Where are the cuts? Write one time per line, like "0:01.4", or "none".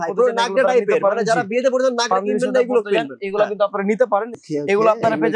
0:04.3